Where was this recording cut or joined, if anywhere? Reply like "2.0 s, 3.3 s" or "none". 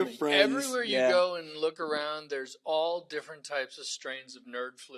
none